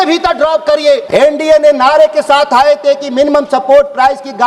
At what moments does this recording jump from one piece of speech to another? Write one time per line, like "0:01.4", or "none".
0:01.0